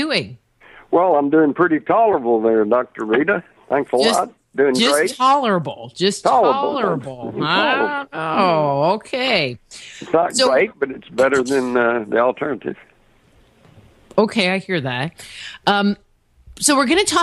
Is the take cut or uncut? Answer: cut